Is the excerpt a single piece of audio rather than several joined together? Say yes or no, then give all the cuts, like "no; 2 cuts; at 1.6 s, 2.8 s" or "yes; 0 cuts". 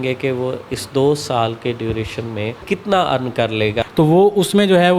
no; 2 cuts; at 2.6 s, 3.8 s